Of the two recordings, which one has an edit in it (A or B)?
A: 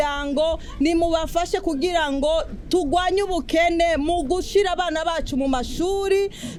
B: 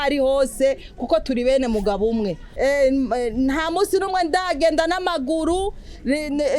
B